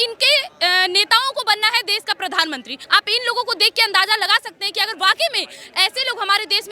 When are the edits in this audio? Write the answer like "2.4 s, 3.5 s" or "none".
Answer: 2.7 s